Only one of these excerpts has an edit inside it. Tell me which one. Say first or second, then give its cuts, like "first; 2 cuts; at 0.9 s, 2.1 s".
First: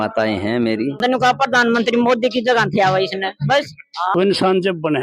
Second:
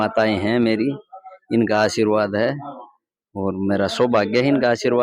first; 2 cuts; at 1.0 s, 4.1 s